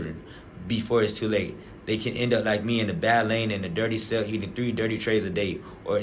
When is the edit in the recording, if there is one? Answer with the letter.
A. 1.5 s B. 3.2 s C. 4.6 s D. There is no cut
A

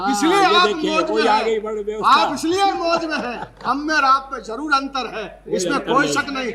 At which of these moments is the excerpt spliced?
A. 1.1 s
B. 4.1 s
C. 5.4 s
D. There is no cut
D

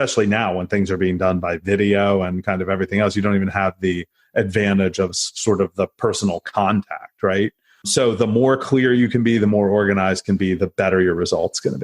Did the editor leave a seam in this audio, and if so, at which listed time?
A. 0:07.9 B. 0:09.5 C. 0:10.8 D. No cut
A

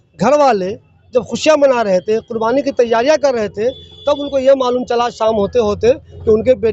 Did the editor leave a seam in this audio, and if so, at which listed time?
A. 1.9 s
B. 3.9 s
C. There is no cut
C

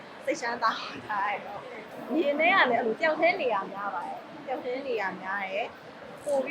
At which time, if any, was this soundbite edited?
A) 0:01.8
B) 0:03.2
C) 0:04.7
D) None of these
A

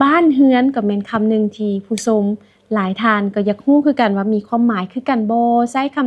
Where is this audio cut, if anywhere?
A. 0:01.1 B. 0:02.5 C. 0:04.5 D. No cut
D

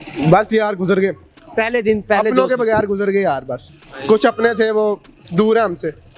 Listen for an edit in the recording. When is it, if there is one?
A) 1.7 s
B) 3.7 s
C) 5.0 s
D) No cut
D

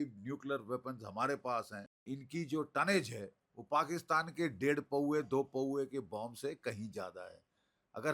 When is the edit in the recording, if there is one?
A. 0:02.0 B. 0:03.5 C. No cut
A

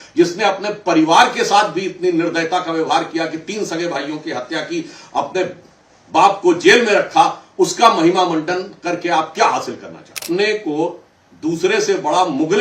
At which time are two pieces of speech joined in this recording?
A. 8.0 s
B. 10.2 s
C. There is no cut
B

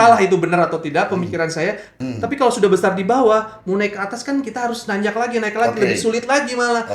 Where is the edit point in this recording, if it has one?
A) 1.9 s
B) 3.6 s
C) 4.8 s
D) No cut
A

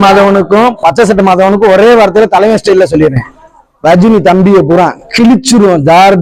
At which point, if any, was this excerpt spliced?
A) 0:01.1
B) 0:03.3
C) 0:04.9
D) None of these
D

